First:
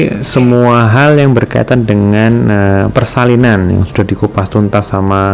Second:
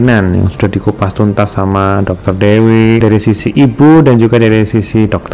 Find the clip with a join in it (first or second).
second